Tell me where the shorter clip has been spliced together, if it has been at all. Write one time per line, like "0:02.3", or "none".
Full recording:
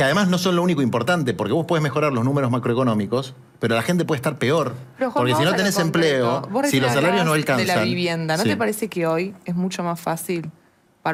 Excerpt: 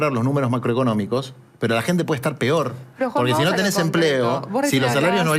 none